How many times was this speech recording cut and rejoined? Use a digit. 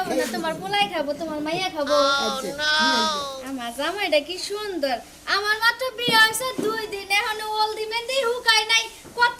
0